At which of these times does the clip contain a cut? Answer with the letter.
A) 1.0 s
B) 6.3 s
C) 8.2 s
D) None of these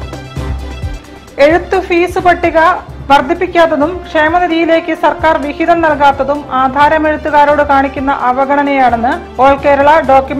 A